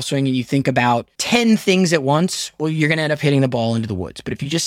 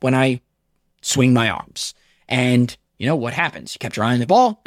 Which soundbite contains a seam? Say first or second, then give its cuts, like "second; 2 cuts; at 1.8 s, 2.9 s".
first; 1 cut; at 1.1 s